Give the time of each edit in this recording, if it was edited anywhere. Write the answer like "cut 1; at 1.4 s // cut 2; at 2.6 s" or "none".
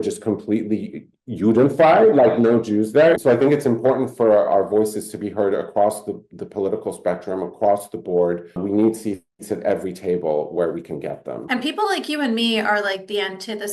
cut 1; at 3.2 s // cut 2; at 8.6 s // cut 3; at 11.4 s